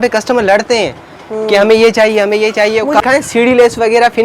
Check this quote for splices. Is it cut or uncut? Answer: cut